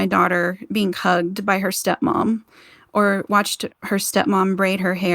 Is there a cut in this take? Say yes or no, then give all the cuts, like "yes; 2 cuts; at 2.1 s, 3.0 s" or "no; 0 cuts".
yes; 1 cut; at 3.7 s